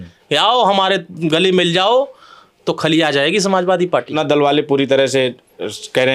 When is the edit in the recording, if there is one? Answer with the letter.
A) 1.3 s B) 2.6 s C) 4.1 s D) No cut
C